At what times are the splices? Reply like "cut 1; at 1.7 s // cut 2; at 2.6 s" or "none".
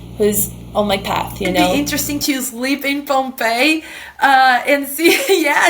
cut 1; at 1.7 s